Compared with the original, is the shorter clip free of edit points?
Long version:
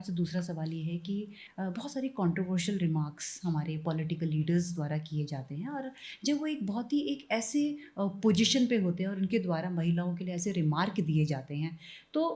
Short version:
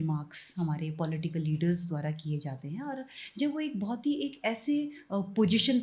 yes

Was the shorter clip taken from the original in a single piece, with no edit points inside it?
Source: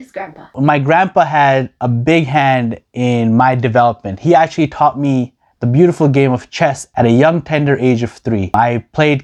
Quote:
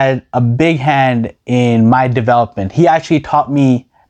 yes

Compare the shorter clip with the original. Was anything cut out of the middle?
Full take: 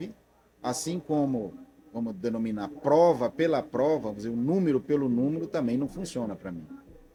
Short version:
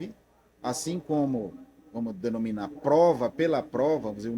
no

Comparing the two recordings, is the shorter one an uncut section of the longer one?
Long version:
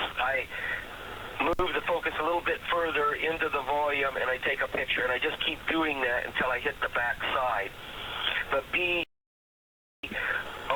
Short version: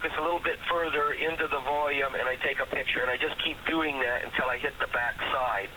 yes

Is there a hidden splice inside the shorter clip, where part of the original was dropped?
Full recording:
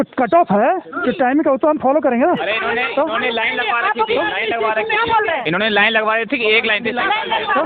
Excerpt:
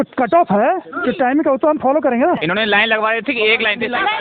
yes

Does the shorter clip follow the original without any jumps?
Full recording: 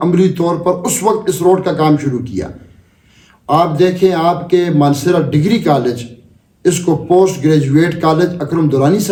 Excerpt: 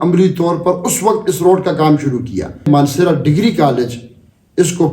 no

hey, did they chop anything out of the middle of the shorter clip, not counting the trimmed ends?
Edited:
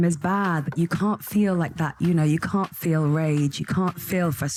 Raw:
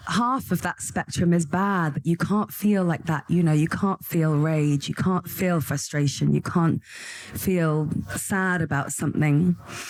no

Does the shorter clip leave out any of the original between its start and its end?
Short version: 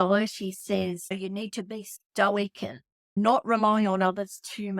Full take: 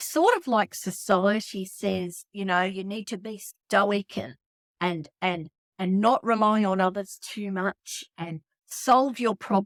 yes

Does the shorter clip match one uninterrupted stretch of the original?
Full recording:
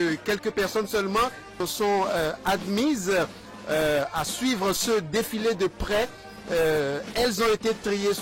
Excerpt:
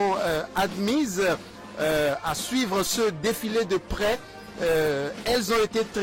yes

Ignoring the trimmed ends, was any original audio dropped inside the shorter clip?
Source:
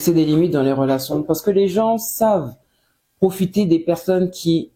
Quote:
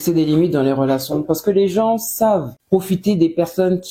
yes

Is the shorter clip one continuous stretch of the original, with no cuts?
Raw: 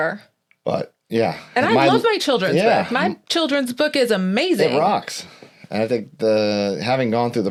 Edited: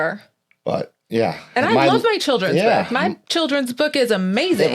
yes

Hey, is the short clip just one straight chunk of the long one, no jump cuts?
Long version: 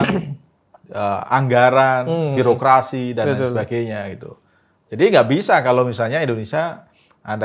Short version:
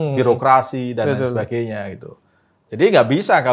yes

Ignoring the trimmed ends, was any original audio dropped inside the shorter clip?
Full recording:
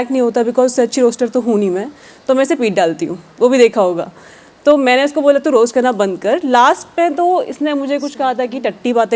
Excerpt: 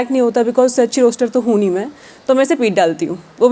no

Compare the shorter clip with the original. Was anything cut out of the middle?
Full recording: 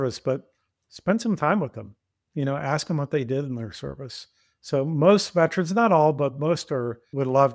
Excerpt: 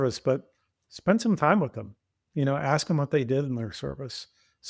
no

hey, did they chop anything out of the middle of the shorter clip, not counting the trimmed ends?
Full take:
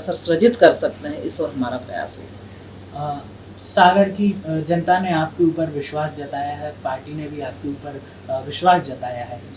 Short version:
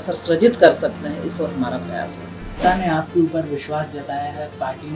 yes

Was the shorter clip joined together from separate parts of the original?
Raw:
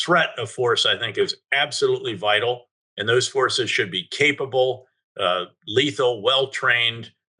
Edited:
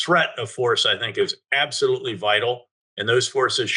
no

